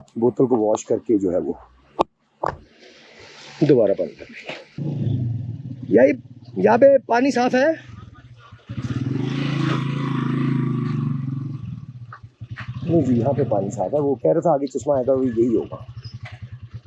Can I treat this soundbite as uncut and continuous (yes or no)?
no